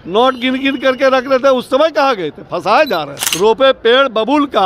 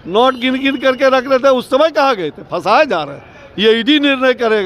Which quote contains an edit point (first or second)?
first